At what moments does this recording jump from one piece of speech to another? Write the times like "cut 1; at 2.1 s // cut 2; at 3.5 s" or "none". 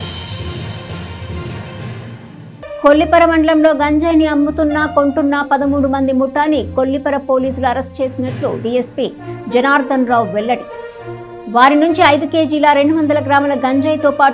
cut 1; at 2.8 s